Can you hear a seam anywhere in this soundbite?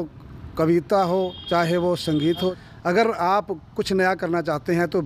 yes; 1 cut; at 2.6 s

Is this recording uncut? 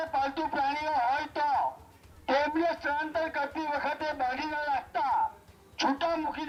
yes; 0 cuts

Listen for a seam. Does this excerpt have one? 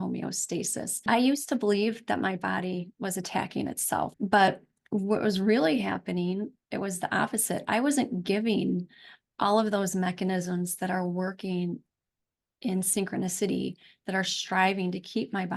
yes; 2 cuts; at 1.0 s, 4.1 s

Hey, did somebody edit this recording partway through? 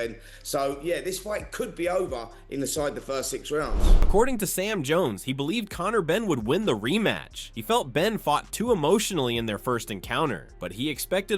no; 0 cuts

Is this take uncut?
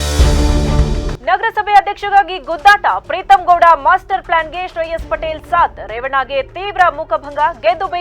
no; 1 cut; at 1.1 s

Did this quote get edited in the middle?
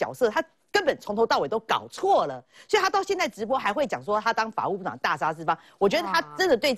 no; 0 cuts

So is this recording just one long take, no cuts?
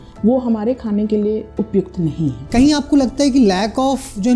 no; 2 cuts; at 1.5 s, 2.5 s

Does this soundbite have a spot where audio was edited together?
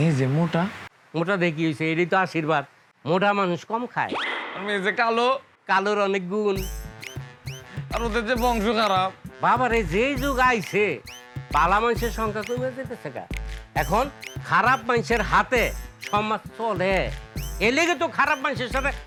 no; 0 cuts

